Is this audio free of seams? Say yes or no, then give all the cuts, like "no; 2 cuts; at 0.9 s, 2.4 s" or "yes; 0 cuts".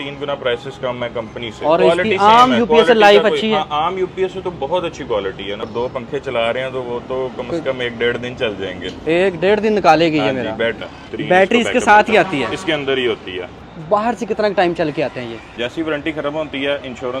no; 5 cuts; at 1.8 s, 5.7 s, 11.1 s, 13.7 s, 15.5 s